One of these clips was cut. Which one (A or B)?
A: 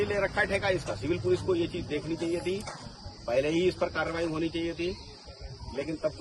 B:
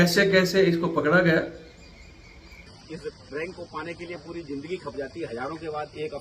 B